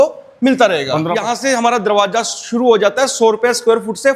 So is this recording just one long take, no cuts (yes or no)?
no